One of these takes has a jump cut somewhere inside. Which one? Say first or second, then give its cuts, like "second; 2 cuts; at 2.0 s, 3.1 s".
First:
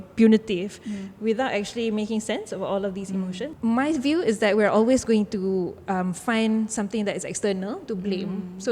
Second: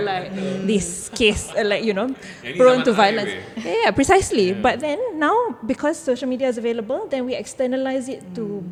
first; 1 cut; at 3.5 s